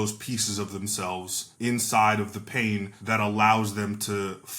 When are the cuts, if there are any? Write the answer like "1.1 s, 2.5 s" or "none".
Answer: 1.4 s, 2.9 s